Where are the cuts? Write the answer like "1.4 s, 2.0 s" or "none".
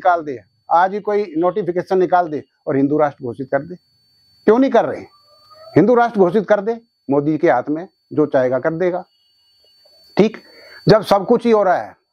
none